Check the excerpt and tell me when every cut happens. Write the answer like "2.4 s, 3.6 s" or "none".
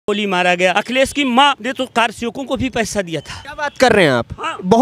0.7 s, 1.6 s, 3.4 s